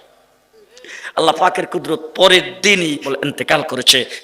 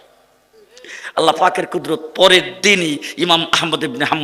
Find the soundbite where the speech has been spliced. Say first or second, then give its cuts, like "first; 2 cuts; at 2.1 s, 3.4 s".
first; 1 cut; at 3.1 s